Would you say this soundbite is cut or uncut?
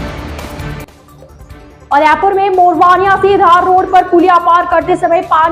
uncut